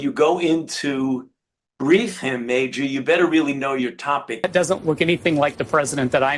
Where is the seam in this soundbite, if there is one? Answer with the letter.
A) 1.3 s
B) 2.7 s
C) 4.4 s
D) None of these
C